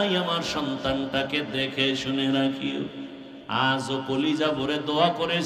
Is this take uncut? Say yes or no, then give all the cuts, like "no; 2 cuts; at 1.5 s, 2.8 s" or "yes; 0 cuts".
yes; 0 cuts